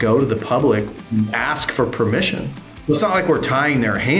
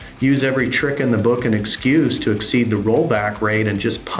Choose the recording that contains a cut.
first; 2 cuts; at 1.0 s, 2.7 s

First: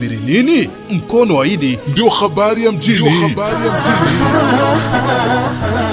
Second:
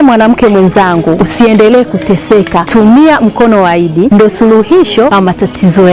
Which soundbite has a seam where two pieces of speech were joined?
second; 4 cuts; at 1.2 s, 2.6 s, 4.1 s, 5.1 s

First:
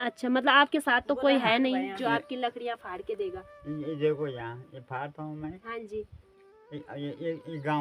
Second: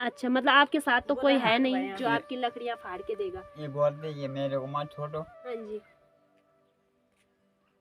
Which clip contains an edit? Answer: second; 1 cut; at 3.5 s

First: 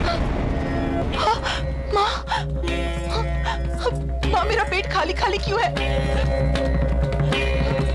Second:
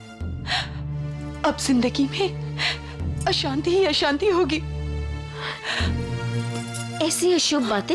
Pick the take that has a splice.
first; 1 cut; at 1.0 s

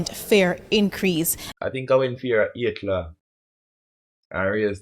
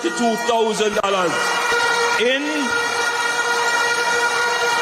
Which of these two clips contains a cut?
first; 1 cut; at 1.4 s

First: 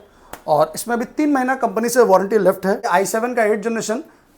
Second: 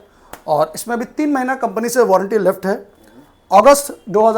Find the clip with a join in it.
first; 1 cut; at 2.9 s

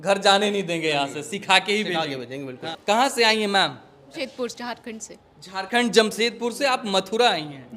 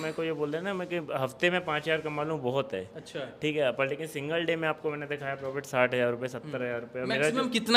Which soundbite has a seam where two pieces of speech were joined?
first; 2 cuts; at 2.7 s, 4.1 s

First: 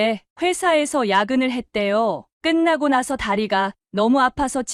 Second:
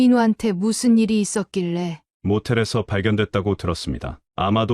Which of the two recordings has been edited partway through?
second; 1 cut; at 2.0 s

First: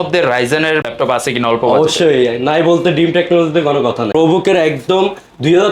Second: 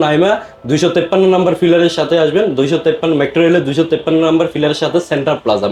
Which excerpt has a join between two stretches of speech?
first; 2 cuts; at 0.9 s, 4.1 s

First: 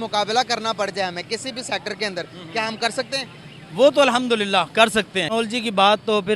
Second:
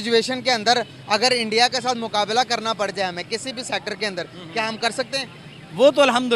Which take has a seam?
first; 1 cut; at 5.3 s

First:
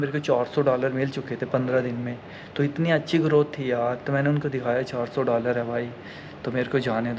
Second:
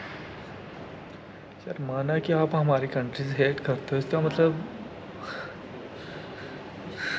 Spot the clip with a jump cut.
second; 1 cut; at 1.6 s

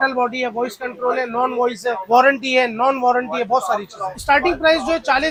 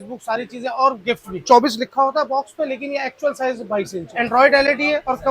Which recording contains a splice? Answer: second; 2 cuts; at 1.3 s, 4.0 s

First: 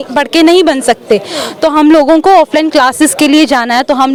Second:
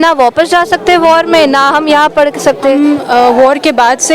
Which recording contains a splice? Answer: second; 1 cut; at 2.8 s

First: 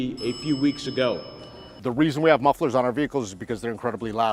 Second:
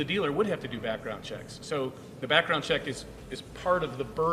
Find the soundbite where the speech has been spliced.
first; 1 cut; at 1.7 s

